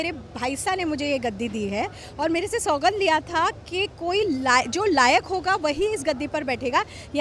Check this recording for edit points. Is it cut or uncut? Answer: uncut